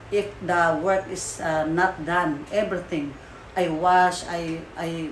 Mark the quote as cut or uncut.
uncut